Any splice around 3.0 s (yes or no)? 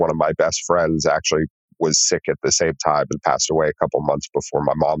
no